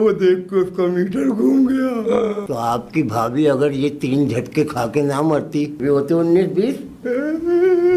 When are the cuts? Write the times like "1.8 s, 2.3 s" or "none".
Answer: 2.4 s, 5.7 s, 7.0 s